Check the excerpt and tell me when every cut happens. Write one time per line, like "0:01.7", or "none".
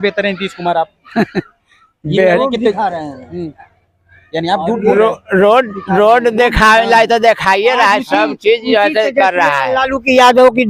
none